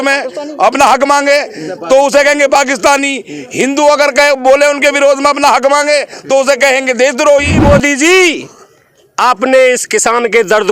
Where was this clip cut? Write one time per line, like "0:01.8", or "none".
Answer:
0:07.6